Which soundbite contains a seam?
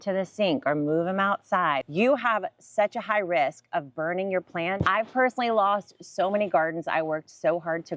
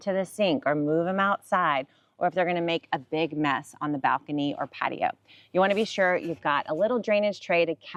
first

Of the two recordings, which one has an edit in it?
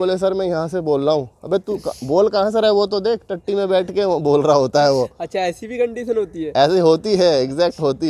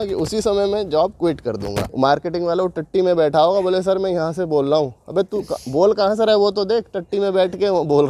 second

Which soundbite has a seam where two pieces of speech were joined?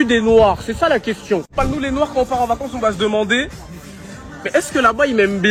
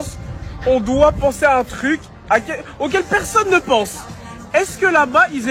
first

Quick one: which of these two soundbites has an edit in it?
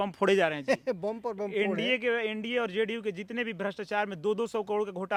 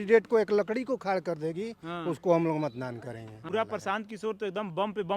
second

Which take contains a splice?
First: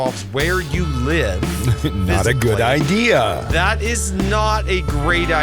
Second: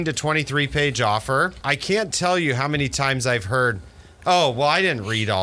second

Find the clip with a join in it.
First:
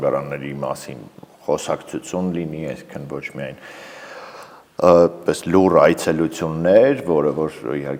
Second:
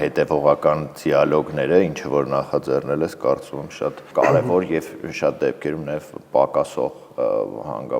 second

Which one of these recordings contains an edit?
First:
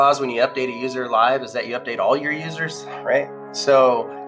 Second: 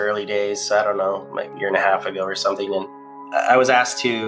second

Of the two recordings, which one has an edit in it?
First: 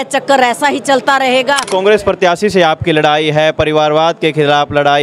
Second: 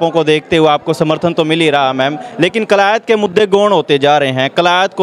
first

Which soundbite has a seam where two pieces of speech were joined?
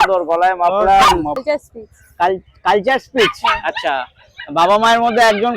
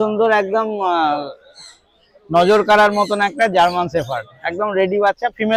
first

